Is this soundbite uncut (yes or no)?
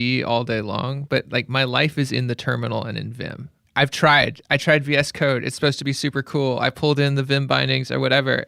yes